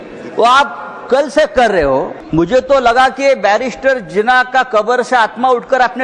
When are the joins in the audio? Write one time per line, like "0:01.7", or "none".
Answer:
0:02.2